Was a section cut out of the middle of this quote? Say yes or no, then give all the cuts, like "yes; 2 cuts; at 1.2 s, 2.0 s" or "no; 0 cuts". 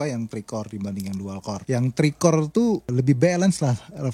yes; 2 cuts; at 1.6 s, 2.9 s